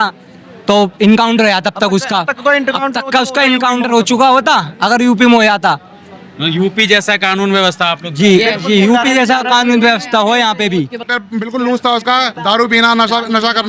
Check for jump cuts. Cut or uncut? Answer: cut